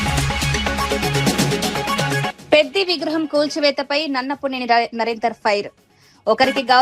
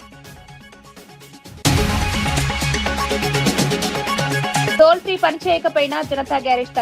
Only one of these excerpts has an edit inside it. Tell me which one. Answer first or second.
second